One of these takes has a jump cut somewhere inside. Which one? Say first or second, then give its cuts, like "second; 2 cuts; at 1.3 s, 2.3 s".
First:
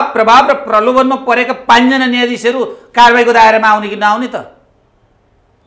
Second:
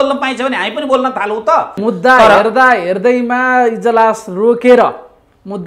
second; 1 cut; at 1.7 s